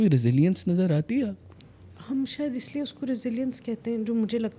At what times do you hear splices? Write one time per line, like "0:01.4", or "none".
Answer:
none